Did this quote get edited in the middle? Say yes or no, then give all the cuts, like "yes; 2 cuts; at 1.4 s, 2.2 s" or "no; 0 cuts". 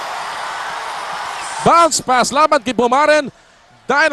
yes; 1 cut; at 1.5 s